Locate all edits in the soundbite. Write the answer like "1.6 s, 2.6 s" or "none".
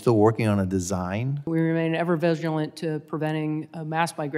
1.5 s